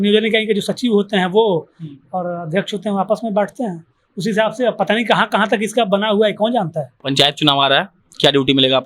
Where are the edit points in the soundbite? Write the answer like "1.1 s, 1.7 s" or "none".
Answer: 6.9 s